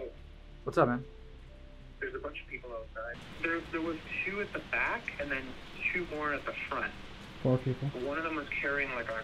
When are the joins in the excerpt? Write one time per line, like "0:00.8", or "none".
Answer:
0:03.2